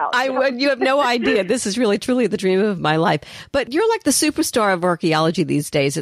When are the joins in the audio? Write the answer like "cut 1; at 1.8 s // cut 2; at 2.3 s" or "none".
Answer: cut 1; at 3.7 s